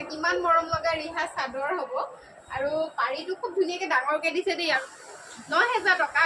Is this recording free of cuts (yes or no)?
no